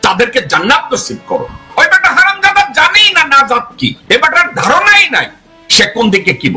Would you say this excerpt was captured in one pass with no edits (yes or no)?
no